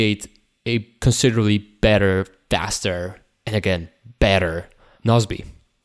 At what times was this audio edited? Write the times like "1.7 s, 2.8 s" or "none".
0.9 s, 2.4 s, 4.9 s